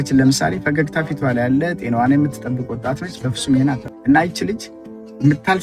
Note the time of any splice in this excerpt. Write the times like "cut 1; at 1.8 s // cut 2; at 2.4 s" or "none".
cut 1; at 3.9 s